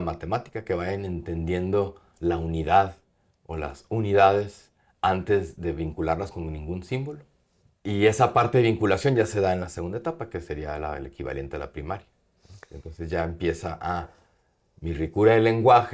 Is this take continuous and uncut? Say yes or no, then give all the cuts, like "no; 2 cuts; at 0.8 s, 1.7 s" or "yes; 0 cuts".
yes; 0 cuts